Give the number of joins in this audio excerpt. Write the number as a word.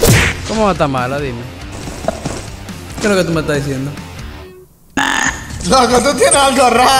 zero